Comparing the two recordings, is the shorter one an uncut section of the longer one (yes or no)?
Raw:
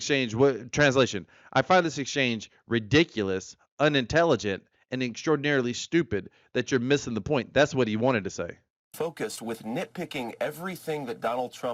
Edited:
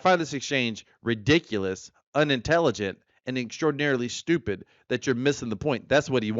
yes